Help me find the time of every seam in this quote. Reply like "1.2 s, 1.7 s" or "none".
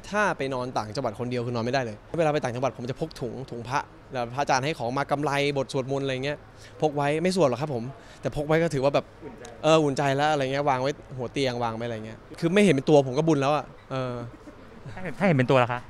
2.2 s, 12.2 s